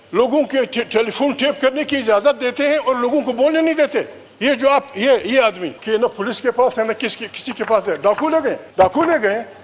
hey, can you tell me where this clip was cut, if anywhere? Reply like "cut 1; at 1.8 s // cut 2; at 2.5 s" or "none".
cut 1; at 4.2 s // cut 2; at 5.7 s // cut 3; at 8.6 s